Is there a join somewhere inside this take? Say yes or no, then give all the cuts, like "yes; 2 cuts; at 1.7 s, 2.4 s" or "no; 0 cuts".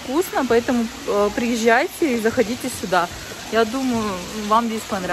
no; 0 cuts